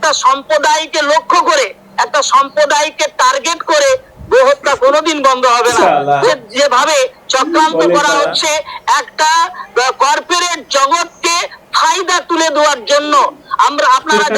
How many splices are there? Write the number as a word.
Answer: one